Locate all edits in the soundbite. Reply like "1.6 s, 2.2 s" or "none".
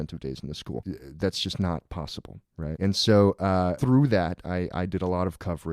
1.0 s, 2.8 s, 3.8 s

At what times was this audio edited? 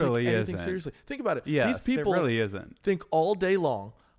none

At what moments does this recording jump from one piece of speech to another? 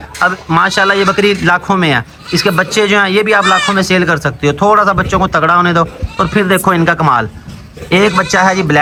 none

